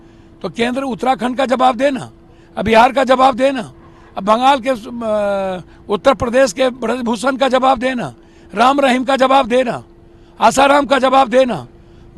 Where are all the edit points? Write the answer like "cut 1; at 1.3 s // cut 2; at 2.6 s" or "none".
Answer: none

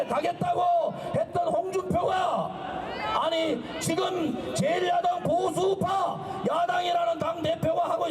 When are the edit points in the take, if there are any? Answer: cut 1; at 2.6 s

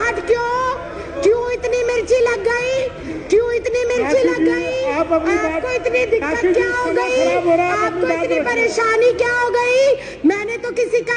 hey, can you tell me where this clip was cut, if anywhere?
none

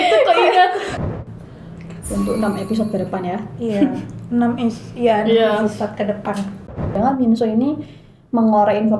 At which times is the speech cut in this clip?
cut 1; at 1.0 s // cut 2; at 6.8 s

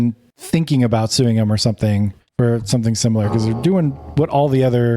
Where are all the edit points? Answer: none

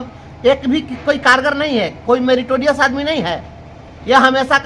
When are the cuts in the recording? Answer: none

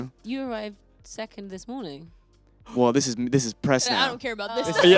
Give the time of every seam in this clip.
none

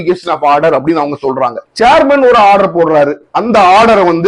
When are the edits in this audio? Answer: cut 1; at 1.6 s

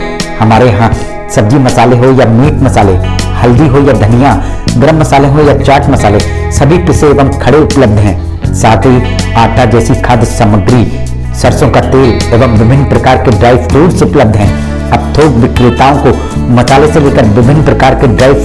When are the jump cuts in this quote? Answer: none

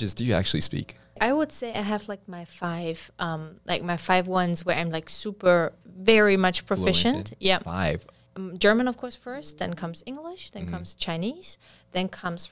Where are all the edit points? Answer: cut 1; at 1.2 s // cut 2; at 8.2 s

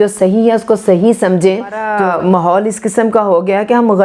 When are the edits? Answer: cut 1; at 1.9 s

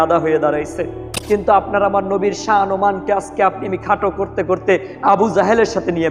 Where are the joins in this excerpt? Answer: cut 1; at 1.1 s

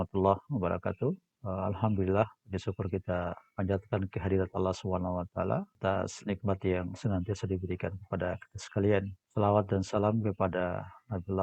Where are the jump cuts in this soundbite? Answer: cut 1; at 1.3 s // cut 2; at 5.7 s // cut 3; at 9.2 s

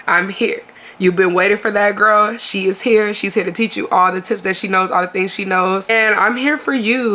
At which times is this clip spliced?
cut 1; at 5.9 s

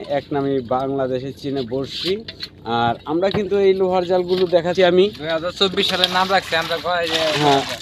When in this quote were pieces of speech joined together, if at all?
none

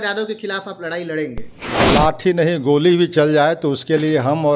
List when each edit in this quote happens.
cut 1; at 1.7 s

